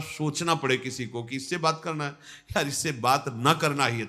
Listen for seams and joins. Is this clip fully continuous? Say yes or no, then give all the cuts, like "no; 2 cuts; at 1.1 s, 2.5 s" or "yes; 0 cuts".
yes; 0 cuts